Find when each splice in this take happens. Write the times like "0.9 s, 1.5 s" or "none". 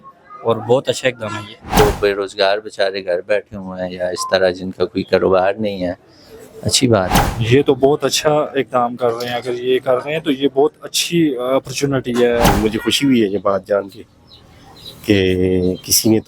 1.8 s, 7.2 s, 12.5 s